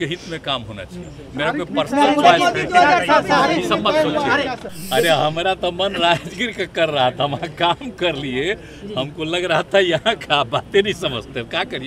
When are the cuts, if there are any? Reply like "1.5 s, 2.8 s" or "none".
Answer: 4.7 s